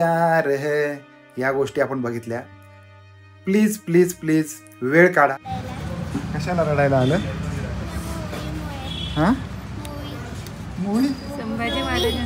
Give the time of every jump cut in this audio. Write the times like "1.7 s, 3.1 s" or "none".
5.3 s